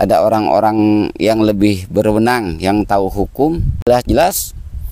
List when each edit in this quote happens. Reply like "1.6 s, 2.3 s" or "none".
3.9 s